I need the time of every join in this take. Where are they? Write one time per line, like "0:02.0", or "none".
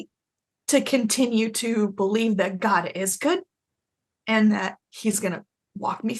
none